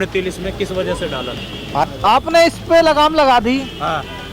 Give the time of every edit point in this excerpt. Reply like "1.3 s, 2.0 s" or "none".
1.8 s